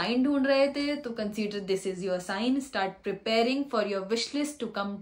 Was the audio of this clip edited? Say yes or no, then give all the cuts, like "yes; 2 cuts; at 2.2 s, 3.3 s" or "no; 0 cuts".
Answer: no; 0 cuts